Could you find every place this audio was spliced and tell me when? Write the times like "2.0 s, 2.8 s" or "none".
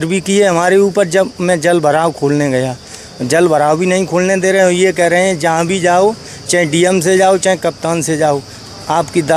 none